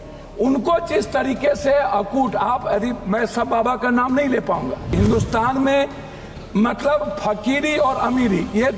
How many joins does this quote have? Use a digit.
1